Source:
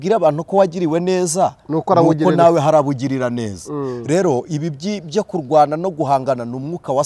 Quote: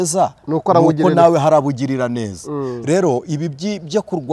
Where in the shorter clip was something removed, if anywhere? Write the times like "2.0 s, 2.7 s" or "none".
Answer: none

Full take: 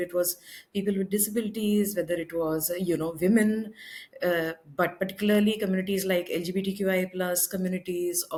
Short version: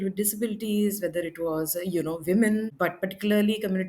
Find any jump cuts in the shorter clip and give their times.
2.7 s

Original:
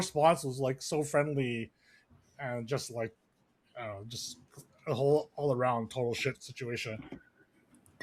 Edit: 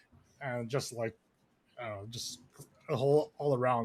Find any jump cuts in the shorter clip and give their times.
none

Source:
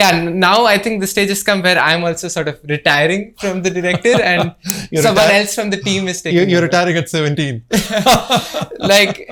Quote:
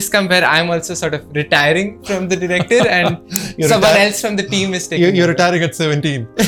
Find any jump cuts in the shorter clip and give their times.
none

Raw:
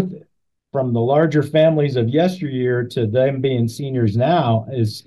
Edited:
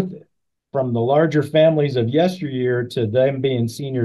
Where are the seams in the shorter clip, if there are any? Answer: none

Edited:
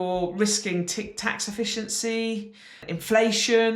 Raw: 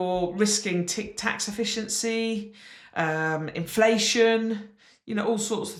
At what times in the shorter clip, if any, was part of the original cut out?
2.8 s

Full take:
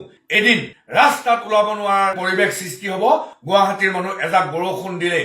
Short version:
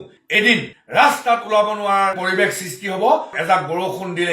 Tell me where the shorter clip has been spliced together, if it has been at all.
3.3 s

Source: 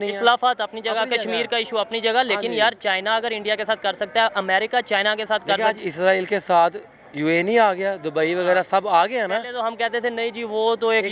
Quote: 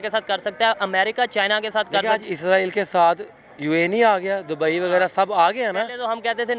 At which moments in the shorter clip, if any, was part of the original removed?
none

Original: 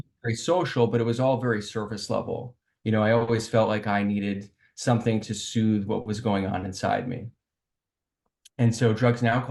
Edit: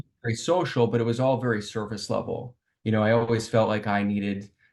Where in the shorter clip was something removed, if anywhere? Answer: none

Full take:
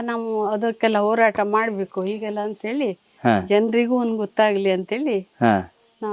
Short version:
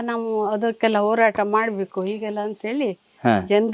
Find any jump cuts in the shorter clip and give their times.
none

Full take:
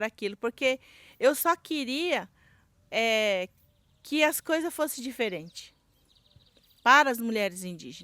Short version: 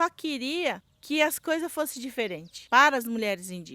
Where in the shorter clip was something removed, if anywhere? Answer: 0.9 s, 2.5 s

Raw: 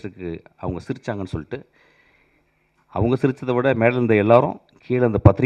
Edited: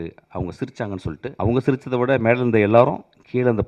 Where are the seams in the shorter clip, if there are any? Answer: 1.3 s

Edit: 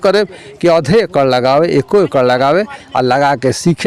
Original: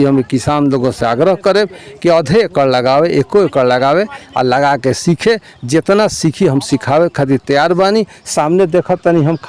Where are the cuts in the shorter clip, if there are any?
none

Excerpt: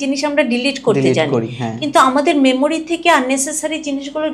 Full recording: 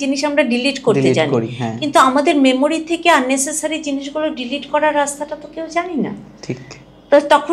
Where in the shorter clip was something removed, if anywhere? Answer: none

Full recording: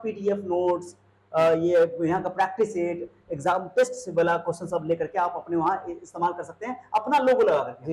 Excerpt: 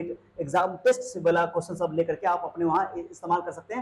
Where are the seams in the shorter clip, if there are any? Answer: none

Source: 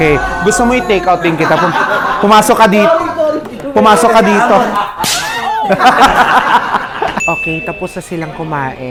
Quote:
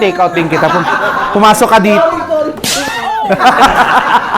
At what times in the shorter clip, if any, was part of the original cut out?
2.7 s

